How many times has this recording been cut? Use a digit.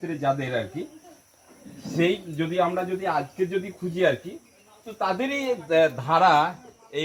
0